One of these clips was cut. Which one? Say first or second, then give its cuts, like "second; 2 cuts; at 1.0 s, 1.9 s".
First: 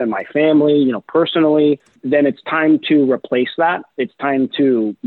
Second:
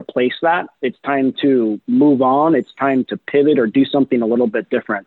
first; 1 cut; at 1.9 s